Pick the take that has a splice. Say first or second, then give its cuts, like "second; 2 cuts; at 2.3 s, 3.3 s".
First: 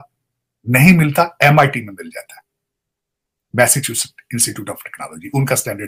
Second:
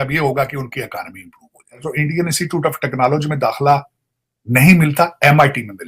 second; 1 cut; at 1.8 s